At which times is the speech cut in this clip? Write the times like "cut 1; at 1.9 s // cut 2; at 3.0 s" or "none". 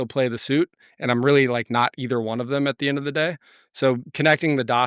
none